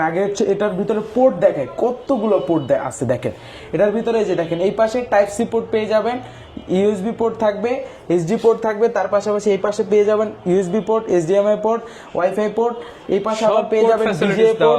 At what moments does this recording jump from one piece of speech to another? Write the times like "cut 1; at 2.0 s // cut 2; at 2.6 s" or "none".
none

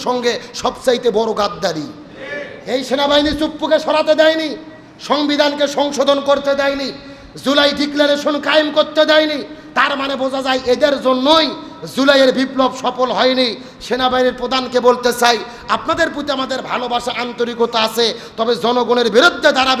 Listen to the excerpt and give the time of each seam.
none

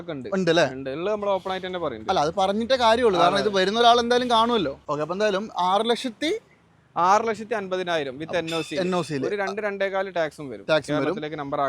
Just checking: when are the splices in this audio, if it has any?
cut 1; at 4.8 s

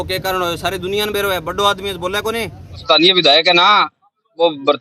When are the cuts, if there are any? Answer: cut 1; at 2.8 s

